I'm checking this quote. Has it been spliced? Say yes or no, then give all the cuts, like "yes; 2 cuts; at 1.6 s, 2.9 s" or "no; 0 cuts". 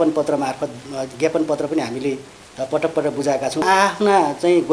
yes; 1 cut; at 3.6 s